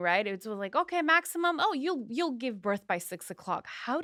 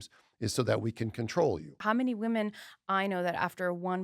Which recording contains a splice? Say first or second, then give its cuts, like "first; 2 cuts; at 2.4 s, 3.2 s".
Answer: second; 1 cut; at 1.7 s